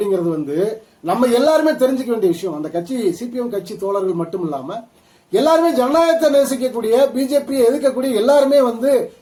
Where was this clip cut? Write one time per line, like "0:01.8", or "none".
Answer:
none